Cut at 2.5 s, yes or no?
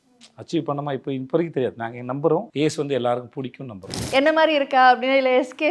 yes